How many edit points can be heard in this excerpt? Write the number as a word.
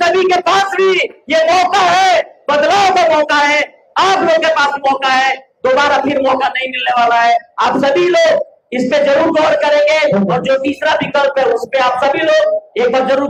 zero